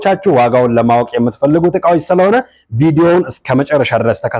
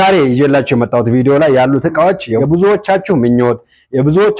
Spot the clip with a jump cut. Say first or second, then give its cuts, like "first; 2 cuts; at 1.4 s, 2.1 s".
second; 1 cut; at 2.3 s